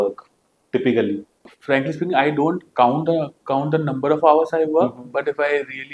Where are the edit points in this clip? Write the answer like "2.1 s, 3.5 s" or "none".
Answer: 1.5 s